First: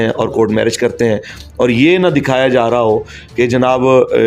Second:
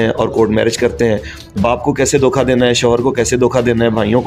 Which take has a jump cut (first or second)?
second